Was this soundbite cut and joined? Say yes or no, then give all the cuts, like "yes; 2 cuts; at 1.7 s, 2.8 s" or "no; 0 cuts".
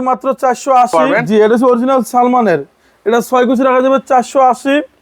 yes; 1 cut; at 1.2 s